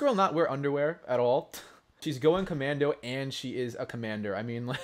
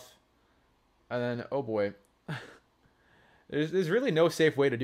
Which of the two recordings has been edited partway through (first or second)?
first